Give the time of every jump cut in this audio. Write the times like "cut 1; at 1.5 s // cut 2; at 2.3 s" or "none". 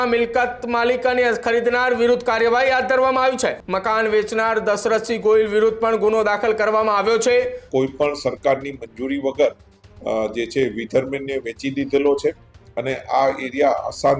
cut 1; at 3.7 s // cut 2; at 7.6 s

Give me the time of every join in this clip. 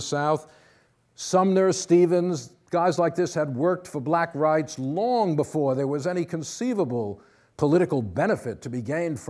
cut 1; at 3.8 s

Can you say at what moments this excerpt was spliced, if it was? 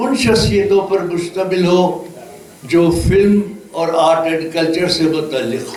none

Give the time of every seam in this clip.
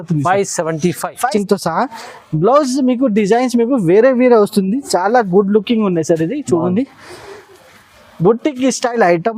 cut 1; at 1.3 s

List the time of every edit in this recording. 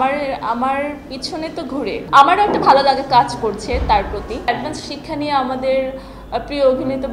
cut 1; at 2.0 s // cut 2; at 4.5 s

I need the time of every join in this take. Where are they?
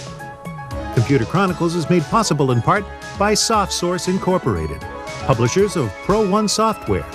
cut 1; at 0.9 s

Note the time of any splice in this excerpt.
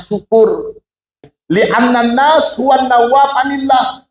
cut 1; at 1.3 s

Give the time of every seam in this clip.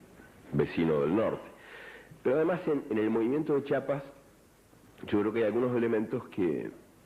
none

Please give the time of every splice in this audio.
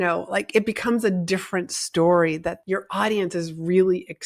cut 1; at 2.5 s

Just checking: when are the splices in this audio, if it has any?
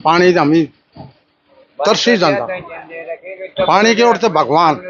none

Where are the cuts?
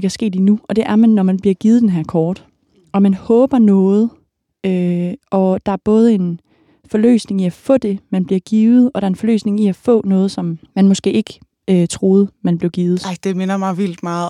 cut 1; at 10.6 s // cut 2; at 13.0 s

